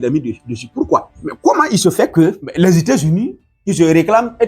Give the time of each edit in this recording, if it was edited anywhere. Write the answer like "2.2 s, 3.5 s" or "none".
1.2 s, 2.4 s